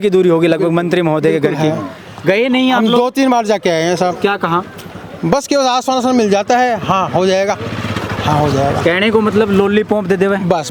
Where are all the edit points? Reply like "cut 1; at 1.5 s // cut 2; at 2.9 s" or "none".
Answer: none